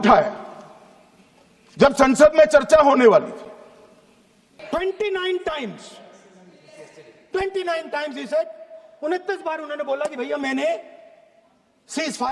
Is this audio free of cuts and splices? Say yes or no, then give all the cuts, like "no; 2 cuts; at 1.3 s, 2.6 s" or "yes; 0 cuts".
no; 1 cut; at 4.6 s